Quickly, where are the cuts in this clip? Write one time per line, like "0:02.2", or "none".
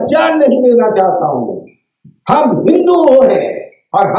none